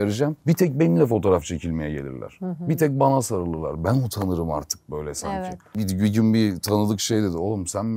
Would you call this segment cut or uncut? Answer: cut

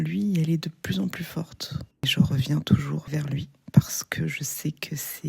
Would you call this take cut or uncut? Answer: cut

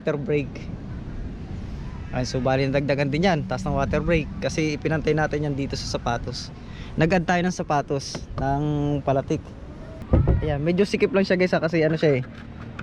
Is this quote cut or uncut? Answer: cut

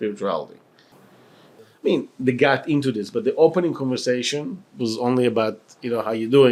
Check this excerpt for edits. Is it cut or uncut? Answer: uncut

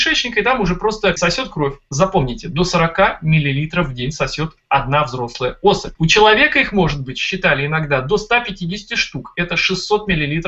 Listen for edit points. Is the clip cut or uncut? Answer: cut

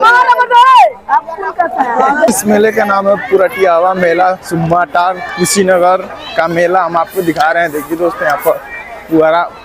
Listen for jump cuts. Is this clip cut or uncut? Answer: cut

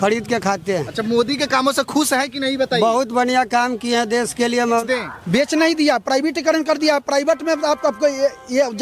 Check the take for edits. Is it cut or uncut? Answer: cut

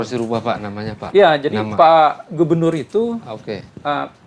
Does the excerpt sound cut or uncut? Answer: uncut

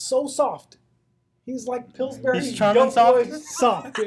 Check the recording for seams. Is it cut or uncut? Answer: uncut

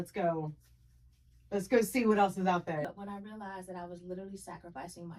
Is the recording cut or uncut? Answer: cut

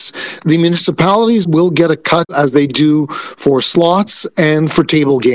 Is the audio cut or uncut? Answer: cut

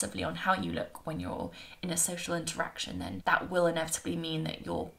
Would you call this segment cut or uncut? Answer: cut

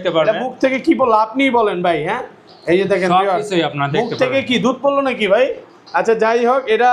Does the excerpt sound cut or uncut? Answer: uncut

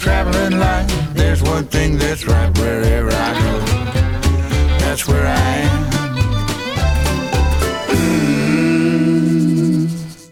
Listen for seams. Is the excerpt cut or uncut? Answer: uncut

